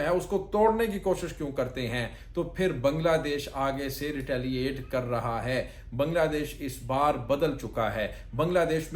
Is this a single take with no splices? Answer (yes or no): yes